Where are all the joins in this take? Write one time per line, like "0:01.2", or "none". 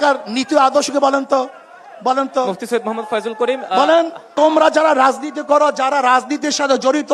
0:04.3